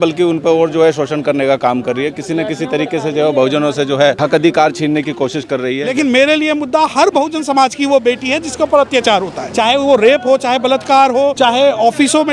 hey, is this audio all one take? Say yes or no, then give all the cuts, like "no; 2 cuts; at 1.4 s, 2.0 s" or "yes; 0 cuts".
no; 4 cuts; at 4.2 s, 5.9 s, 9.4 s, 11.3 s